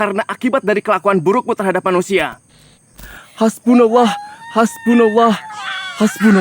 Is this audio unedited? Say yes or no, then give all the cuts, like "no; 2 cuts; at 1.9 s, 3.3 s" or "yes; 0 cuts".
no; 1 cut; at 3.1 s